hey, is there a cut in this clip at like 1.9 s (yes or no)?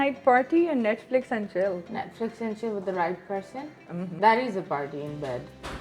yes